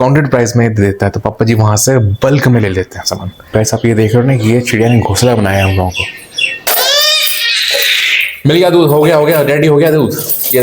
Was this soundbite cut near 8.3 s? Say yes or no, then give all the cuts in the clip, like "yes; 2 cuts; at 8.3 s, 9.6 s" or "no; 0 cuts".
no; 2 cuts; at 3.5 s, 6.6 s